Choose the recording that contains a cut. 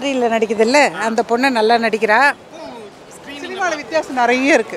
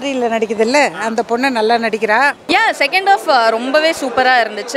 second; 1 cut; at 2.4 s

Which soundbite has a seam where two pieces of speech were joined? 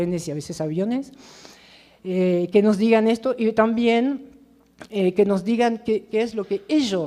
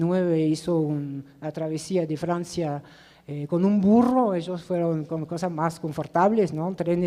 first; 1 cut; at 3.2 s

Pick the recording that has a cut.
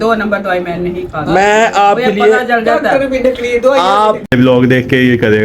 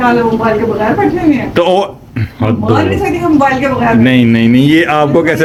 first; 1 cut; at 4.3 s

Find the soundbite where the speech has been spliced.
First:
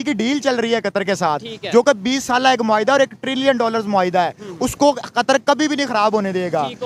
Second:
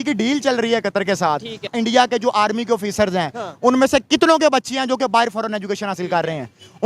second; 1 cut; at 1.6 s

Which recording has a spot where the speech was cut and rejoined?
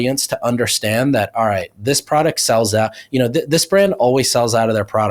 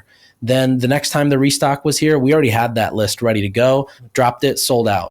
second; 1 cut; at 4.0 s

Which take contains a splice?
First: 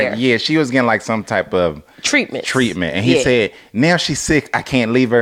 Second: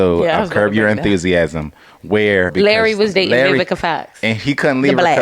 second; 1 cut; at 2.5 s

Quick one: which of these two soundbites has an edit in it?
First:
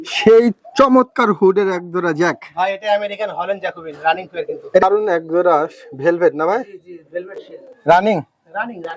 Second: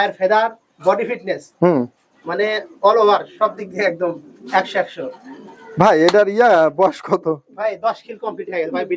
first; 1 cut; at 4.8 s

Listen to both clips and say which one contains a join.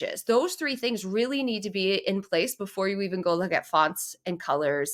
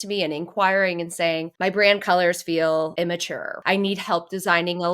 second; 2 cuts; at 1.5 s, 3.5 s

